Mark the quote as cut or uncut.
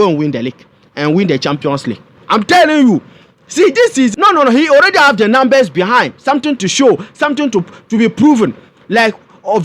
cut